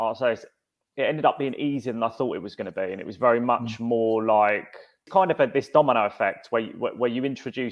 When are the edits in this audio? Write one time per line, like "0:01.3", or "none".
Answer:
0:05.0